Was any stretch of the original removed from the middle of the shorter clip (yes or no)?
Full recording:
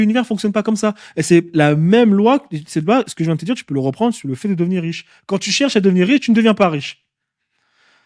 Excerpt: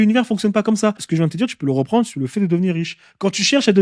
yes